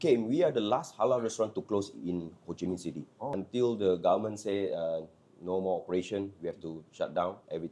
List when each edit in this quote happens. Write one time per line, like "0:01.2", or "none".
0:03.3